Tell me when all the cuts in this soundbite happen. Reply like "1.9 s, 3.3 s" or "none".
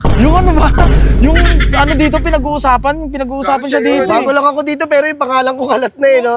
none